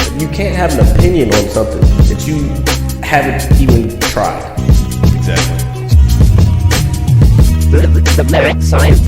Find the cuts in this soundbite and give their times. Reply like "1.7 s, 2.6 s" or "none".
none